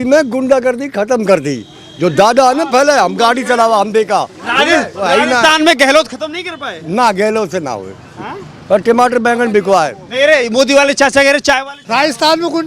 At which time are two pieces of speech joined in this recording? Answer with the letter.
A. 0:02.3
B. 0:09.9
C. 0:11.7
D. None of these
C